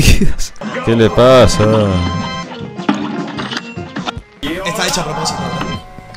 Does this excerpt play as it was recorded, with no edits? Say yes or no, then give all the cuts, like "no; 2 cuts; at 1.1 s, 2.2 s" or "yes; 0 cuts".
yes; 0 cuts